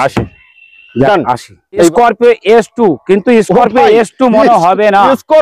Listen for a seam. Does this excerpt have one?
yes; 1 cut; at 1.9 s

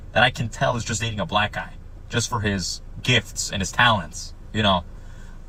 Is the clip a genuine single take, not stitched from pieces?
yes; 0 cuts

